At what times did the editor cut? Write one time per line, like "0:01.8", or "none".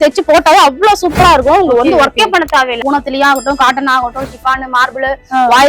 0:02.8